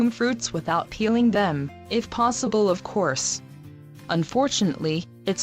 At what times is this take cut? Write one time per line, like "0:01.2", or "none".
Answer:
0:03.1